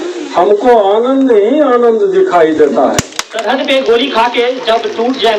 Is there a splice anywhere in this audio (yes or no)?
yes